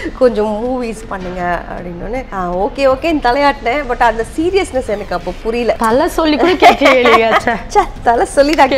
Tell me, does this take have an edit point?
yes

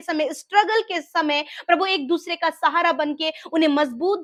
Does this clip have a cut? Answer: no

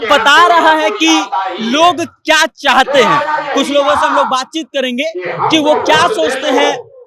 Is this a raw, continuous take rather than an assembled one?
yes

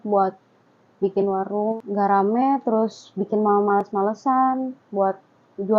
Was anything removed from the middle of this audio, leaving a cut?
yes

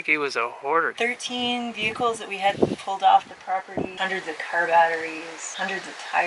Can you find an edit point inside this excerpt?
yes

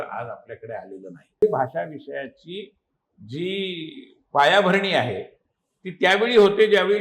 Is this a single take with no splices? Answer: no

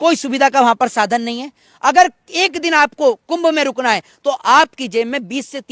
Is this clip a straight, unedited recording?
yes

